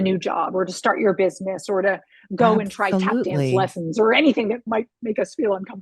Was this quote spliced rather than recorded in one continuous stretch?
yes; 1 cut; at 4.6 s

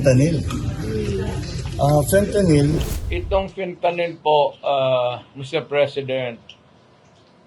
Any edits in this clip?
yes; 1 cut; at 2.8 s

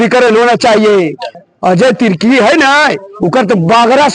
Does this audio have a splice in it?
yes; 1 cut; at 1.4 s

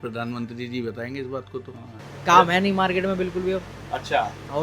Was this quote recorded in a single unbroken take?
no; 1 cut; at 2.0 s

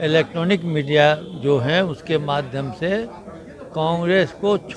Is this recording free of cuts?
yes; 0 cuts

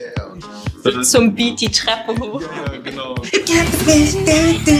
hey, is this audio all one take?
no; 1 cut; at 3.1 s

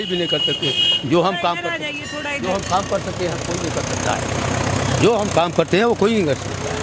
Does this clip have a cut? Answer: no; 0 cuts

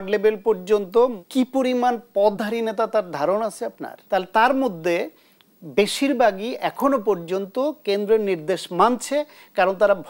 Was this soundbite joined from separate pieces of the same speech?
yes; 1 cut; at 1.2 s

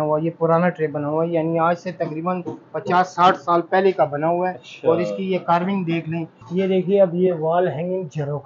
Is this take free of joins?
no; 1 cut; at 6.4 s

